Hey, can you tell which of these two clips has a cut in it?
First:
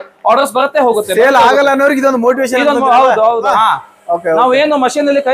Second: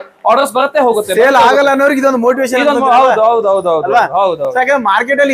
first; 1 cut; at 3.5 s

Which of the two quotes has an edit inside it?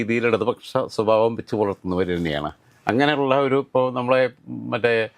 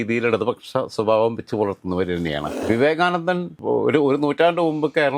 second; 2 cuts; at 2.6 s, 3.5 s

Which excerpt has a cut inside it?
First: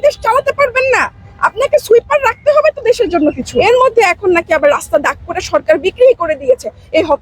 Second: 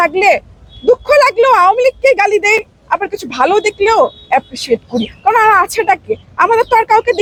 first; 1 cut; at 3.5 s

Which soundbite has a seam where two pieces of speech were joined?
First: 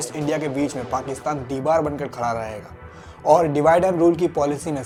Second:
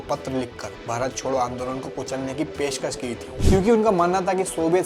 second; 1 cut; at 3.3 s

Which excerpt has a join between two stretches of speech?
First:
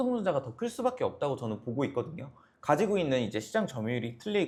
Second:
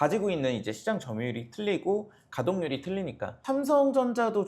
second; 1 cut; at 3.4 s

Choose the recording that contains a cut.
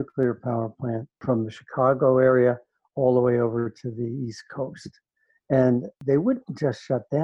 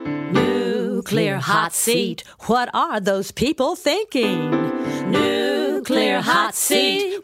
first; 2 cuts; at 1.1 s, 6.0 s

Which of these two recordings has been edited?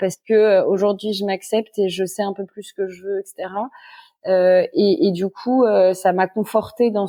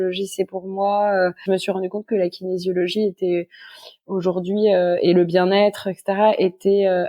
second; 1 cut; at 1.4 s

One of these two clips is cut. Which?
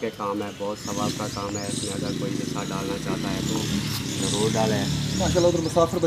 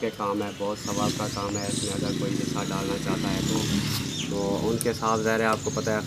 second; 1 cut; at 4.1 s

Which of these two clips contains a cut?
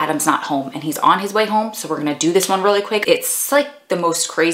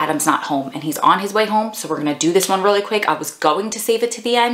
first; 1 cut; at 3.0 s

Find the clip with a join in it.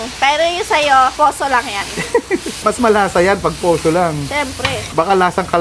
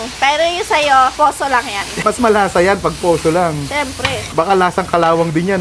second; 1 cut; at 1.9 s

